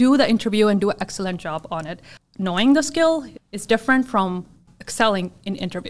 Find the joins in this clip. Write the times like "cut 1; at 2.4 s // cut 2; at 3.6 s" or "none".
cut 1; at 2.0 s // cut 2; at 3.3 s // cut 3; at 4.7 s